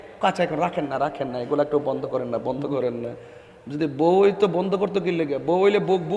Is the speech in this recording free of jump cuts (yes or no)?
yes